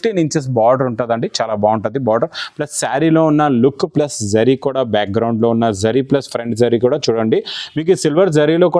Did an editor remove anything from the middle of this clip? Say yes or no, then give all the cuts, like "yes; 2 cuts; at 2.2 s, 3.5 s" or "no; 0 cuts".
no; 0 cuts